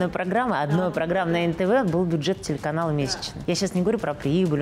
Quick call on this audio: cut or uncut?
cut